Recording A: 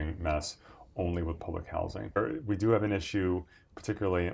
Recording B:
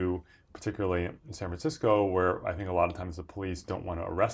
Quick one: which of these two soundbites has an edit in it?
A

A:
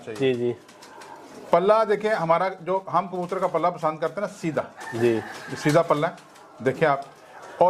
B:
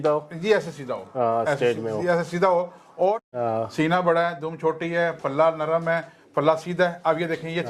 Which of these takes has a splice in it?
B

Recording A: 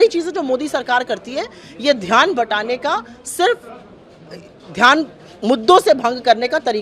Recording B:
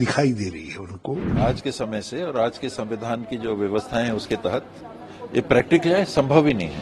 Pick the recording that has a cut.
B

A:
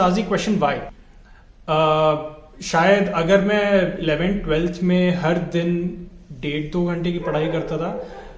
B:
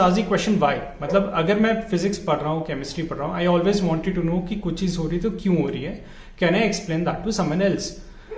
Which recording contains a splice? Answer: A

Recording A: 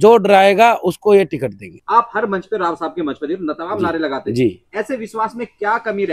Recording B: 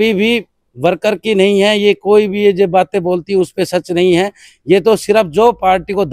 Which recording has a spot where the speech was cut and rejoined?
A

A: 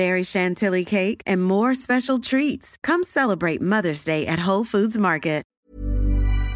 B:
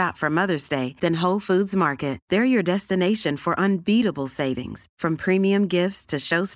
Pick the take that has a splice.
A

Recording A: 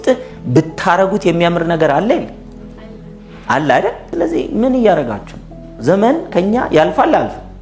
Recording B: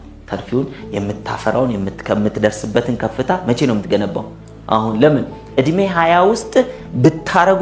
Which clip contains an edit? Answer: A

